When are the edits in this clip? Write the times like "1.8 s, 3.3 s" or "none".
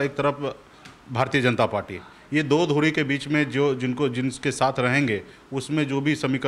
none